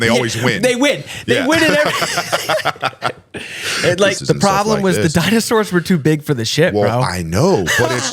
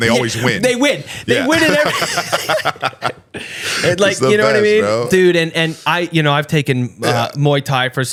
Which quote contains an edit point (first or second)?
first